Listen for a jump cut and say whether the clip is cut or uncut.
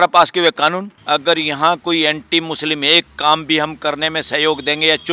cut